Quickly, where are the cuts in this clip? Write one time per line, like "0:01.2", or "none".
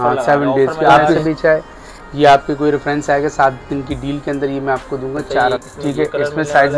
0:01.2
0:05.6